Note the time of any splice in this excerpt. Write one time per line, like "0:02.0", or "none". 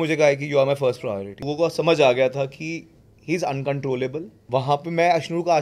0:01.5
0:04.3